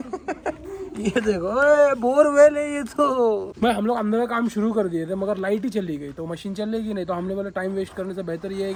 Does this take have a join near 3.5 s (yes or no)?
no